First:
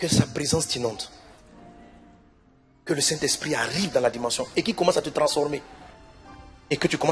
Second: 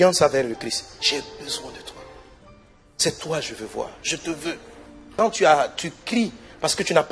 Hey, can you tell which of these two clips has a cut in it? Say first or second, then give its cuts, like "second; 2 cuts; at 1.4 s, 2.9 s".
second; 1 cut; at 5.1 s